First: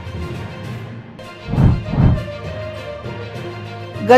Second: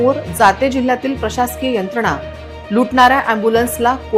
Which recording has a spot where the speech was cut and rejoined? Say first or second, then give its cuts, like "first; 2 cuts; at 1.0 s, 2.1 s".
first; 1 cut; at 1.0 s